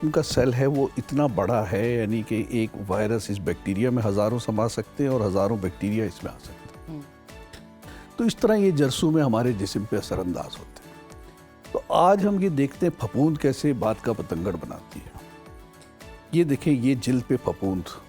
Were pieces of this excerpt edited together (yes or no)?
no